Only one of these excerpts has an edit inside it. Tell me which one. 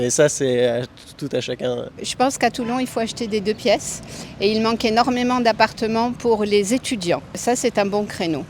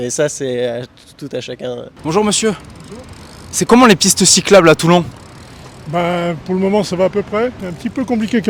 first; 2 cuts; at 1.9 s, 7.4 s

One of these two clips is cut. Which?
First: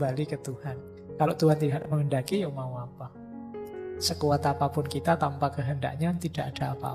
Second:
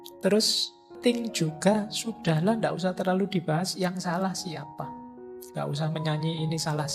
second; 2 cuts; at 0.9 s, 5.0 s

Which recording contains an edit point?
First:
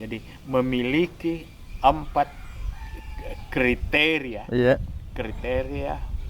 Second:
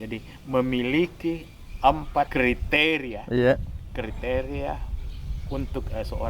second; 1 cut; at 2.3 s

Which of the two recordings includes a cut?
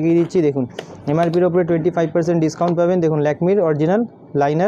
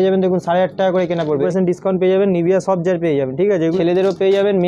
second; 2 cuts; at 1.4 s, 3.8 s

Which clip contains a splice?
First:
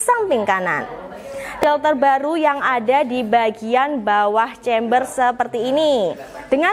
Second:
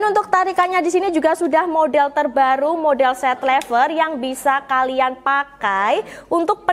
first; 1 cut; at 1.6 s

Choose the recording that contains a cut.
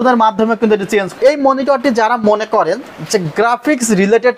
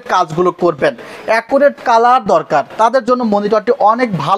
first; 1 cut; at 1.1 s

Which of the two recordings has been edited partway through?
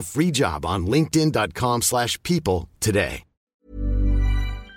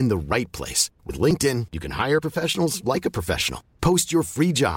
first; 1 cut; at 3.5 s

